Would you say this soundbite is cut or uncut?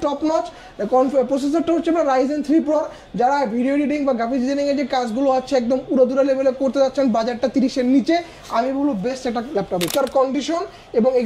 cut